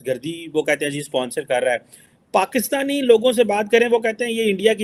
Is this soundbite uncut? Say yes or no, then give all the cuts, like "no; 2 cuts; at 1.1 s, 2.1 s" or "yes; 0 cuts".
yes; 0 cuts